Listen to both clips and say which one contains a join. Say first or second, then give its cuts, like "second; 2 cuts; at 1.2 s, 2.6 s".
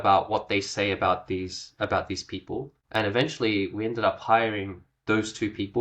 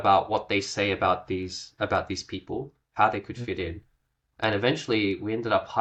first; 1 cut; at 2.8 s